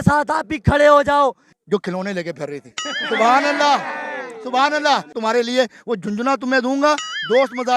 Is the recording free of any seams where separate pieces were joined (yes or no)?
no